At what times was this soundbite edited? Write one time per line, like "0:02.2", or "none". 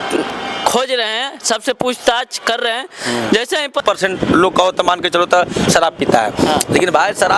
0:03.8